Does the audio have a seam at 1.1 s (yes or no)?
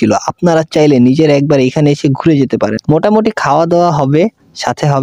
no